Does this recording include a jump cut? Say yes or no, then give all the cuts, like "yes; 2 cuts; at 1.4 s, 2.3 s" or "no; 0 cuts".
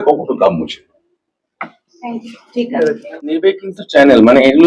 yes; 1 cut; at 3.4 s